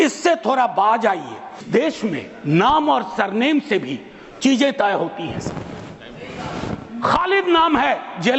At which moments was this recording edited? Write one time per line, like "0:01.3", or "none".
0:01.6